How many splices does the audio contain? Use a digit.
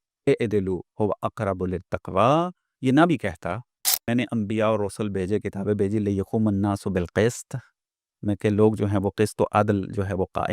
1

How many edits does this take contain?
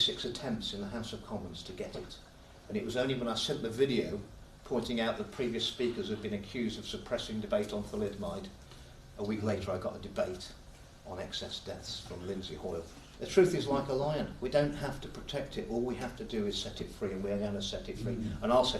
1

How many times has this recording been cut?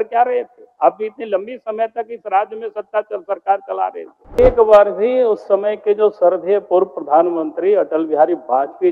1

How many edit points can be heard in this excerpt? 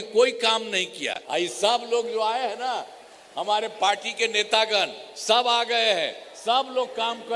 1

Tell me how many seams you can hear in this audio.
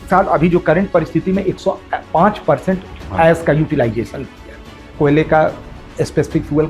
1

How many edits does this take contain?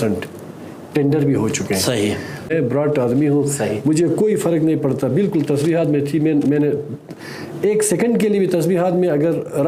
1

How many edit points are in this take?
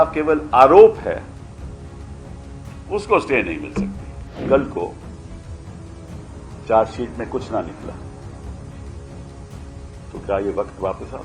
5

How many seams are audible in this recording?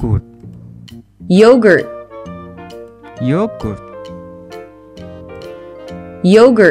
2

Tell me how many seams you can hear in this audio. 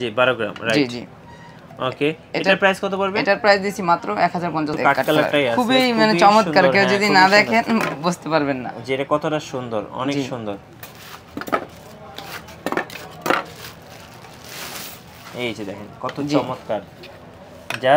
1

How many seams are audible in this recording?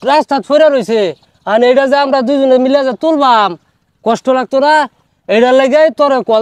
1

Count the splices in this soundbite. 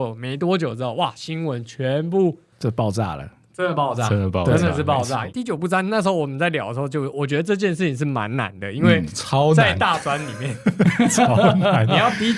1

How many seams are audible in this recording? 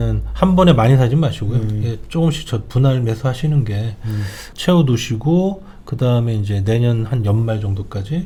0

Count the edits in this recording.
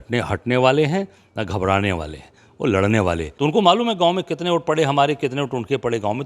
1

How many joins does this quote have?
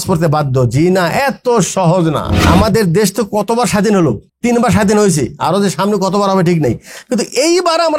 2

